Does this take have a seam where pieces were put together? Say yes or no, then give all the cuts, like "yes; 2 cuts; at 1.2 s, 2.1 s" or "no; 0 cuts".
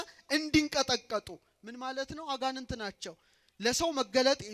no; 0 cuts